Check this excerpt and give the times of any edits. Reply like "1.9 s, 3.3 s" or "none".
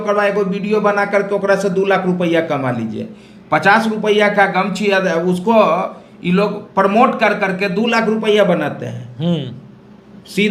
none